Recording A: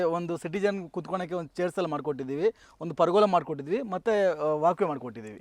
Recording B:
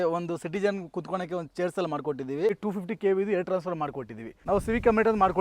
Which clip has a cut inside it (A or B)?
B